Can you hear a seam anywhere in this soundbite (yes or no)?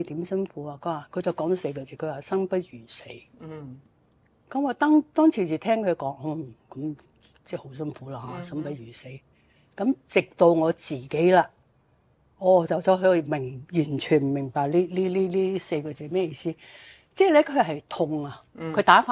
no